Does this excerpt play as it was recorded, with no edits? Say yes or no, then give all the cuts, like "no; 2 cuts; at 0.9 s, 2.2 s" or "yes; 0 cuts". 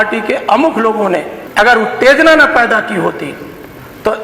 no; 1 cut; at 1.4 s